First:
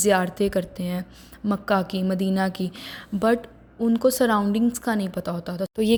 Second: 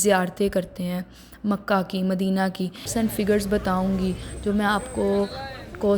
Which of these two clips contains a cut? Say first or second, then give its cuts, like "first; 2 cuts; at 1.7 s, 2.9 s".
second; 1 cut; at 2.9 s